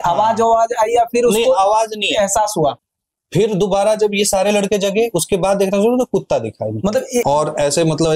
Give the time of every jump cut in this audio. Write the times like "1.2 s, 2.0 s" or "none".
2.8 s, 7.2 s